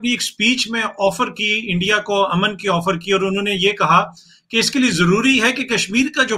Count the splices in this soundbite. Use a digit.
0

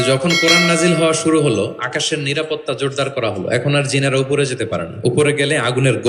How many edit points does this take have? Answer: 0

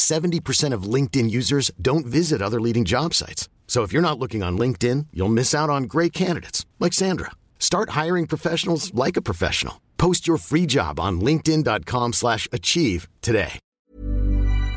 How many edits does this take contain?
1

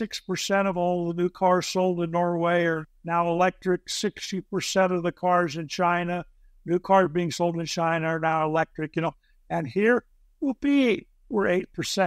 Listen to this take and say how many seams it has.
0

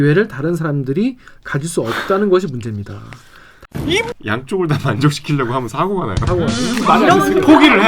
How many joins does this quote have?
1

